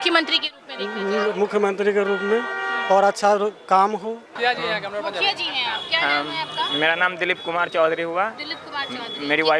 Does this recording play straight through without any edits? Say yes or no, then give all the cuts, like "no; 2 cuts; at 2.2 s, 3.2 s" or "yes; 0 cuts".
yes; 0 cuts